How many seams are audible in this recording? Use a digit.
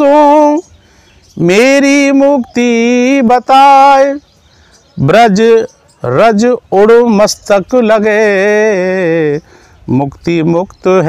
0